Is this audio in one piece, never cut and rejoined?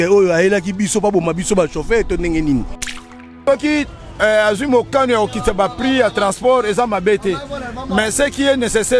no; 1 cut; at 3.2 s

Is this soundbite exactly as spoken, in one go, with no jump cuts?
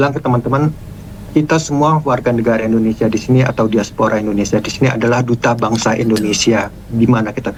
yes; 0 cuts

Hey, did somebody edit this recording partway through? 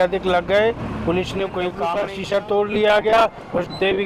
yes; 1 cut; at 1.9 s

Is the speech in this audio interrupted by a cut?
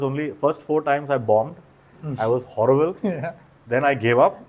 no; 0 cuts

